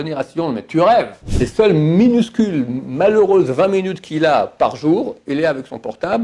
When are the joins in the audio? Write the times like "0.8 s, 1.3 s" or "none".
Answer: 1.2 s

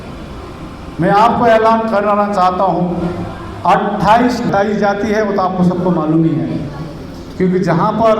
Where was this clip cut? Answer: 4.5 s

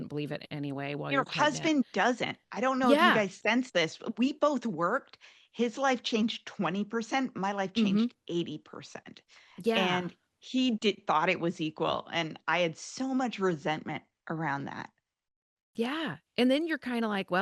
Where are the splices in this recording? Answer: none

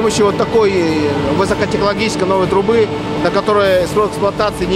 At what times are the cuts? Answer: none

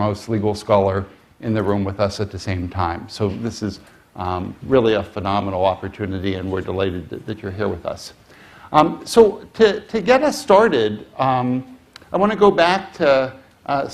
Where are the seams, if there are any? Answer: 8.1 s

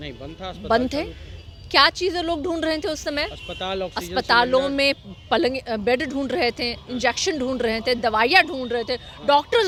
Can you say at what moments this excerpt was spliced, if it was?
none

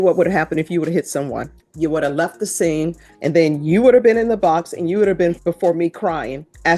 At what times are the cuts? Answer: 1.6 s, 3.1 s, 5.4 s

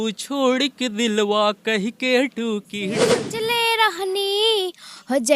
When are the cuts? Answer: 3.2 s

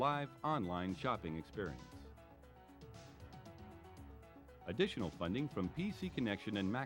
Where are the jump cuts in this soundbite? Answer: 1.8 s, 4.4 s

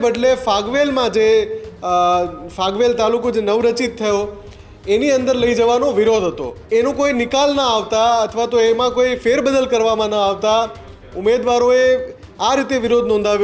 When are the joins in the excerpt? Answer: 6.5 s

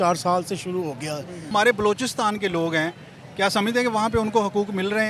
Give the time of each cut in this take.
1.5 s

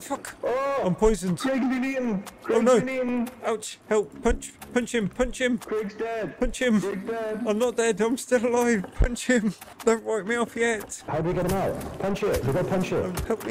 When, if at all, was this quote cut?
none

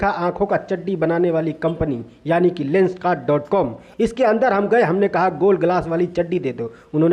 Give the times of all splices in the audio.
none

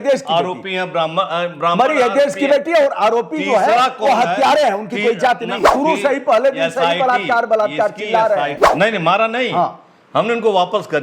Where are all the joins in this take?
5.6 s, 8.6 s

